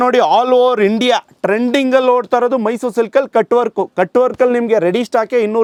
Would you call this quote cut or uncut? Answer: uncut